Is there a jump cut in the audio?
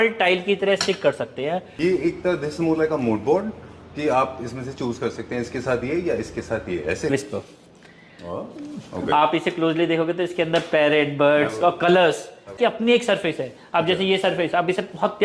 yes; 3 cuts; at 1.7 s, 7.1 s, 12.5 s

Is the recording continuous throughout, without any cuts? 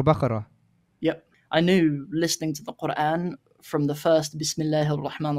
no; 1 cut; at 1.3 s

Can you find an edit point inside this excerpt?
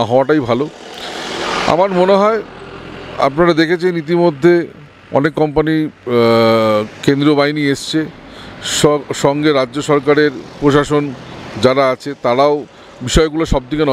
no; 0 cuts

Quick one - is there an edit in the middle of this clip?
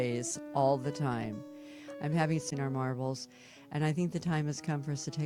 yes; 1 cut; at 2.5 s

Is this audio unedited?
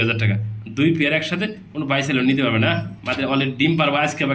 yes; 0 cuts

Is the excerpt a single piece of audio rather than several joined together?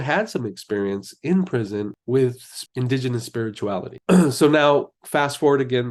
yes; 0 cuts

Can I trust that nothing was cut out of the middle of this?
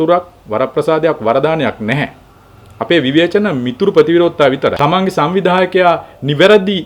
no; 1 cut; at 4.8 s

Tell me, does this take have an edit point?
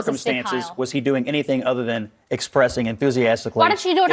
no; 0 cuts

